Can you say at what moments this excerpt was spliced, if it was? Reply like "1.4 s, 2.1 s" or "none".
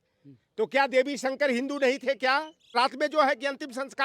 2.7 s